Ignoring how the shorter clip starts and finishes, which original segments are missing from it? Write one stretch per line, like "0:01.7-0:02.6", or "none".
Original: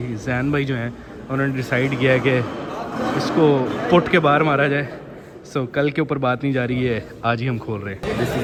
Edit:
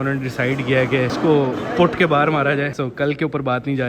0:02.5-0:03.3
0:04.9-0:05.5